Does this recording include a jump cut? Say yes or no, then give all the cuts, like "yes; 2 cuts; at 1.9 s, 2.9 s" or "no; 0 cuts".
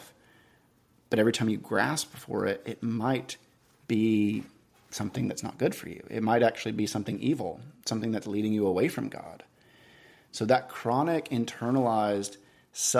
no; 0 cuts